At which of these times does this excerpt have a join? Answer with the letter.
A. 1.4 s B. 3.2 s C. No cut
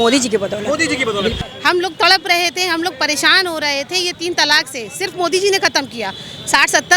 A